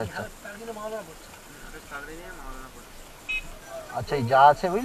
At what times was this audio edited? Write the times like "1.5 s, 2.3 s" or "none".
3.6 s